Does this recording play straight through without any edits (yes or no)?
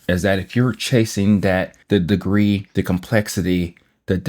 no